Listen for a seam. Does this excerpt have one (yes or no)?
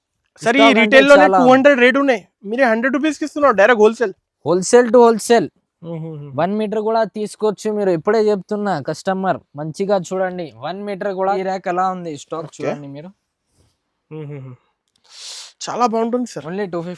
yes